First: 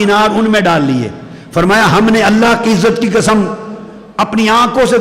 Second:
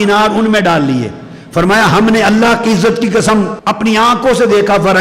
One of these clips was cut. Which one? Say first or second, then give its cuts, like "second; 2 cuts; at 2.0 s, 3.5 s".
second; 1 cut; at 3.6 s